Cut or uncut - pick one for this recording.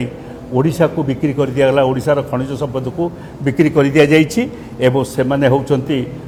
uncut